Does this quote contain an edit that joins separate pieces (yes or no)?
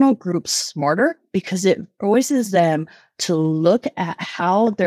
yes